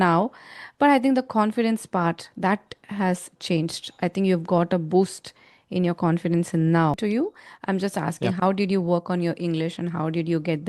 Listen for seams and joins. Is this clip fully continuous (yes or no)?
no